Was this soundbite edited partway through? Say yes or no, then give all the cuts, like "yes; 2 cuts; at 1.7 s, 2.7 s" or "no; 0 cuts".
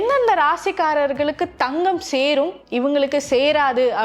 no; 0 cuts